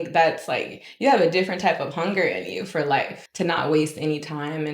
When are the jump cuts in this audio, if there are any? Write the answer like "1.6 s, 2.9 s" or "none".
3.2 s